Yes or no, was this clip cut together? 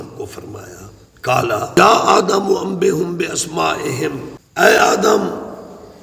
yes